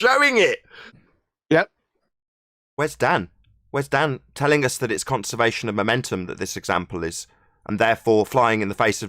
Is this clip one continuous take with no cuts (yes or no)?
no